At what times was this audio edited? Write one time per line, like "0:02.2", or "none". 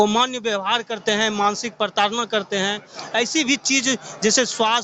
none